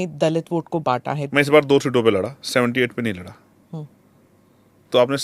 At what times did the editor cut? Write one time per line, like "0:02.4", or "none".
0:01.2